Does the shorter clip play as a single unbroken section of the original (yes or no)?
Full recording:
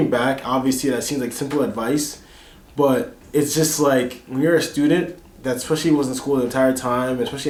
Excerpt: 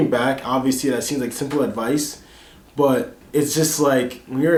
yes